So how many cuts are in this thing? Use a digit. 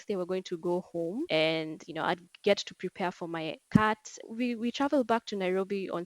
2